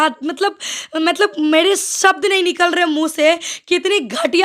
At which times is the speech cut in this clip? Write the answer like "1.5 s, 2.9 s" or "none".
none